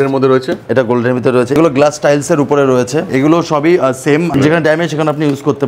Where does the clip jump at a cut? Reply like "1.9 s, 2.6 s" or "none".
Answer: 1.6 s, 3.1 s, 4.3 s